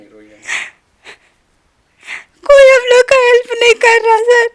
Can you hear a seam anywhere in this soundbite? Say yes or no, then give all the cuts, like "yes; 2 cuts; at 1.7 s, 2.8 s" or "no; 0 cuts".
no; 0 cuts